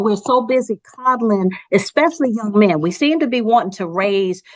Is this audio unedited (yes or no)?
yes